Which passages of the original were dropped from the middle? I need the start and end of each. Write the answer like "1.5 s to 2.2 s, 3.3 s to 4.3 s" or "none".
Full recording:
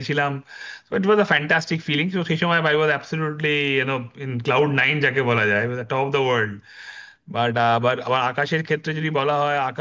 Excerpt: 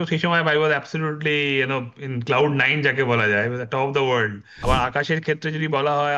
6.8 s to 8.0 s